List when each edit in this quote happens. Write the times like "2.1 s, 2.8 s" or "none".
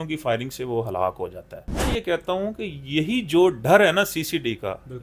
1.9 s